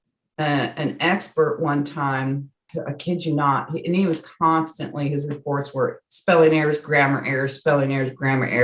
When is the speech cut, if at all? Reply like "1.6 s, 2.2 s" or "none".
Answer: 2.6 s